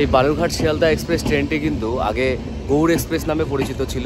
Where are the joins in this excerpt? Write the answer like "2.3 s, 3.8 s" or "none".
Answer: none